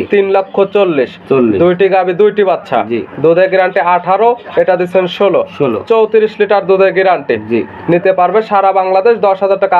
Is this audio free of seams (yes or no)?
yes